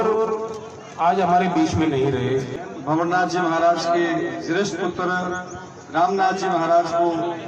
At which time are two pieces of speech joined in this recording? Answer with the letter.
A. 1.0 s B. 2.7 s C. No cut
B